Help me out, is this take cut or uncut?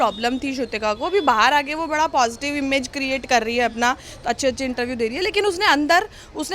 uncut